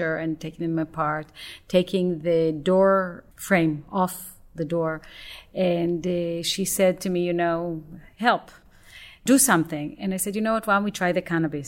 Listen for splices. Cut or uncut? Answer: cut